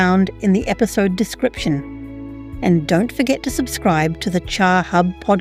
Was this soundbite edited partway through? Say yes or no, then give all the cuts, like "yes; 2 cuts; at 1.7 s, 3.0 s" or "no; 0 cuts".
no; 0 cuts